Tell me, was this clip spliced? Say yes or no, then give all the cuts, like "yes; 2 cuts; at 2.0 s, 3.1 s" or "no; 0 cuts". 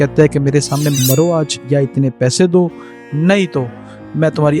yes; 1 cut; at 1.0 s